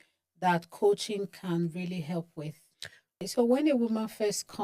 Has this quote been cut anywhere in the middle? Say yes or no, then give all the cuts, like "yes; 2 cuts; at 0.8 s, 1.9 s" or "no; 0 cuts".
yes; 1 cut; at 3.2 s